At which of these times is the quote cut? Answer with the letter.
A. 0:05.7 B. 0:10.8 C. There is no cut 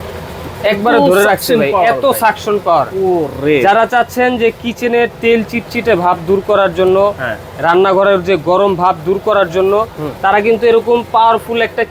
C